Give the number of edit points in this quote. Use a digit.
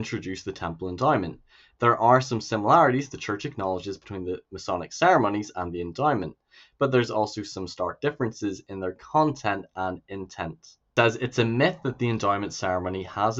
1